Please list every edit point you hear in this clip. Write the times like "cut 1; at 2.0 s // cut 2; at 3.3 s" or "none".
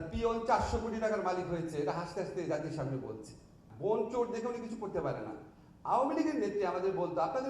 cut 1; at 3.6 s